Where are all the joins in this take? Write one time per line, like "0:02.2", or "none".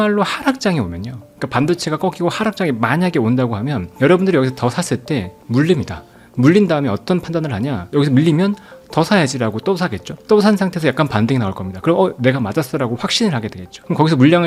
none

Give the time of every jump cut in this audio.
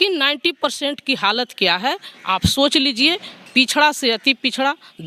none

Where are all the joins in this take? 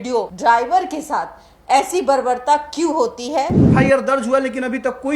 0:03.7

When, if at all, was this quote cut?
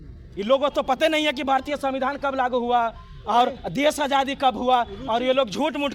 none

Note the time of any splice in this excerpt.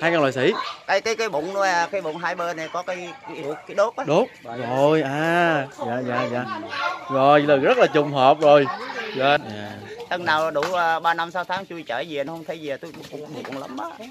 0:09.4

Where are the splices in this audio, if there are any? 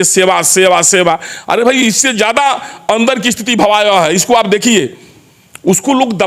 none

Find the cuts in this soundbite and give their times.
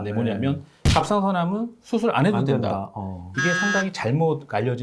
none

